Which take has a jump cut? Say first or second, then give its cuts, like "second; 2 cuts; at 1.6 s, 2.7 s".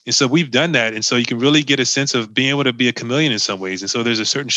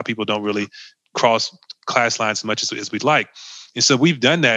first; 1 cut; at 2.3 s